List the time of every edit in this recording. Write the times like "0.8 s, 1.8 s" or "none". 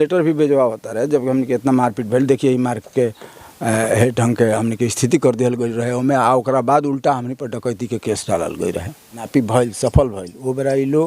9.3 s